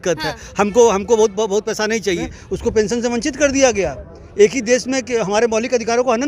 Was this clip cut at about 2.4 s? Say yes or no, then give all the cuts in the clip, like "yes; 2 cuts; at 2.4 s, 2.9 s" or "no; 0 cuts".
yes; 1 cut; at 2.4 s